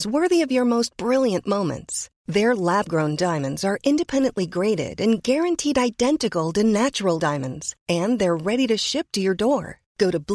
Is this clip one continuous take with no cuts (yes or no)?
yes